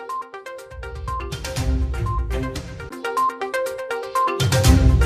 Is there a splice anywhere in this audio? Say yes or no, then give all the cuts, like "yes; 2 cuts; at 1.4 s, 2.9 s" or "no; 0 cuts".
no; 0 cuts